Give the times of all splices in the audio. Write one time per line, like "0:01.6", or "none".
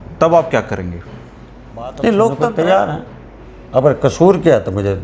0:02.5